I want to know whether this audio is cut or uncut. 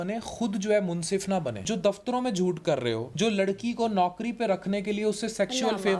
cut